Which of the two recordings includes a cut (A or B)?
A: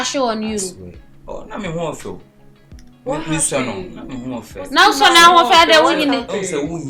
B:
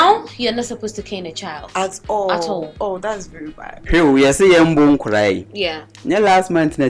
B